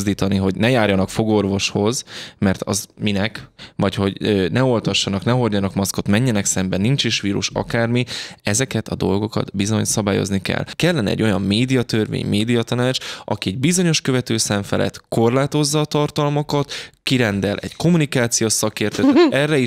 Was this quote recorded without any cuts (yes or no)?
no